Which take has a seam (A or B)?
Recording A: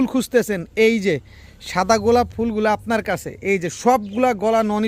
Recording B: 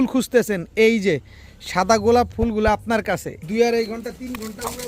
B